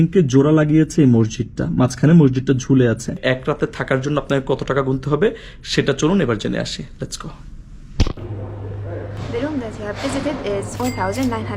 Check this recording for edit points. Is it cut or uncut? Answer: cut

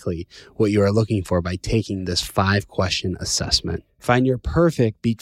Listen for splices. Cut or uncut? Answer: uncut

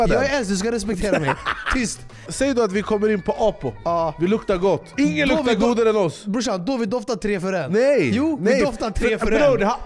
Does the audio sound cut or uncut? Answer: cut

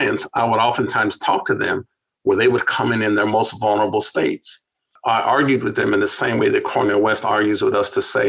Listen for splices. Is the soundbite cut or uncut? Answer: cut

